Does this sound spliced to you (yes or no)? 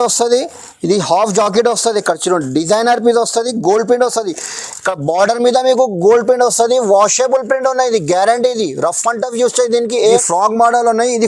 yes